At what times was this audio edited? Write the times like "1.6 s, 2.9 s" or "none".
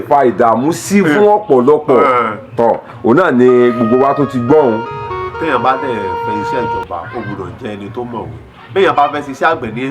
4.9 s